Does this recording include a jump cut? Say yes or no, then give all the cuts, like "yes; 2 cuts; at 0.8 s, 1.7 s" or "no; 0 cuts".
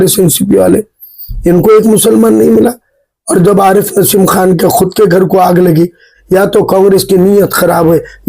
yes; 1 cut; at 6.1 s